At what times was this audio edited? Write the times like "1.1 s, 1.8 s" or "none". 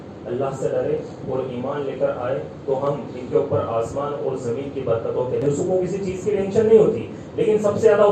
5.4 s